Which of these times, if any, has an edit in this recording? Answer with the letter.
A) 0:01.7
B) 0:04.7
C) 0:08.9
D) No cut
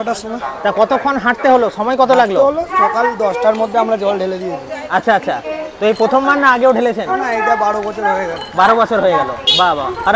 D